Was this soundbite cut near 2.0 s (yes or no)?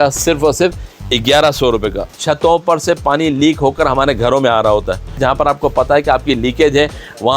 yes